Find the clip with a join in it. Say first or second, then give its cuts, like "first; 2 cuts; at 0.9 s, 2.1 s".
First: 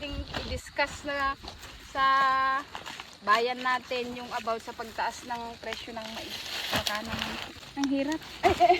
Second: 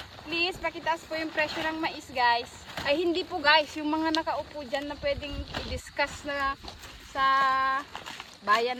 first; 1 cut; at 7.6 s